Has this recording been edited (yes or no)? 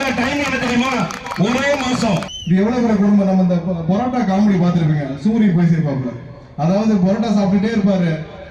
yes